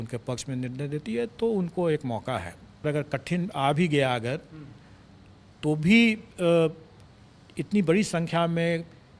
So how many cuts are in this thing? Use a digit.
1